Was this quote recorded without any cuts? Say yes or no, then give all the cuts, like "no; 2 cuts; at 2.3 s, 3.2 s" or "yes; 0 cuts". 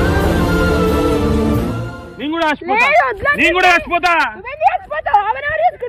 yes; 0 cuts